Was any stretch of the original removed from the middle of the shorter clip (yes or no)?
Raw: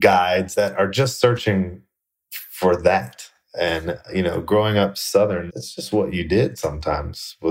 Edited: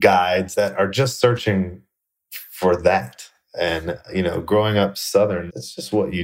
no